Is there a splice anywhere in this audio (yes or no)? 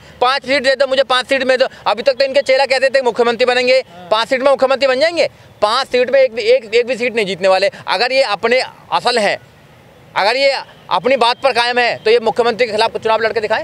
no